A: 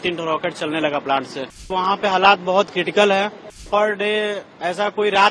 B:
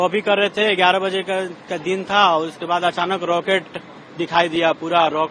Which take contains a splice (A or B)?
A